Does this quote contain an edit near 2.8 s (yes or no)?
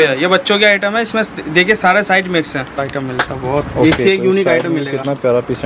yes